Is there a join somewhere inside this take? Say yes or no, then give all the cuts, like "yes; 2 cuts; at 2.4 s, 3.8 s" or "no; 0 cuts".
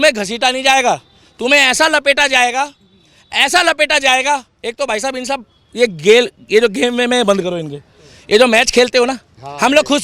no; 0 cuts